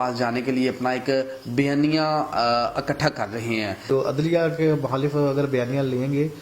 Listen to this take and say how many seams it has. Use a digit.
1